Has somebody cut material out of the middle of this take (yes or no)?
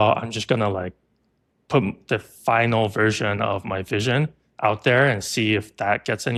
no